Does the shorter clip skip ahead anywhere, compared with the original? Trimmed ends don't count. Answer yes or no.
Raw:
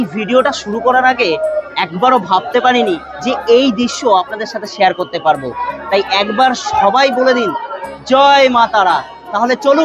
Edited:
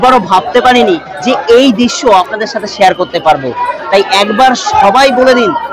no